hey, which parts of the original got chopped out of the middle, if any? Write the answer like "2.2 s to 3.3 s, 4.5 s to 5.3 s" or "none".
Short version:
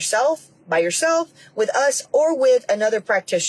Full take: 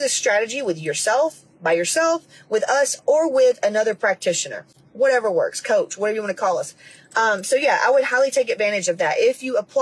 none